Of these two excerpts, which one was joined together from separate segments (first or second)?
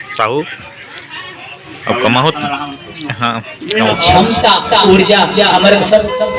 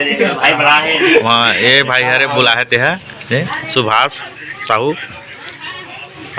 first